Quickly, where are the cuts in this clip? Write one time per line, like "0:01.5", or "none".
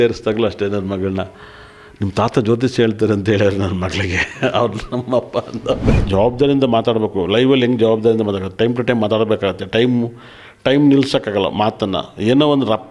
0:06.0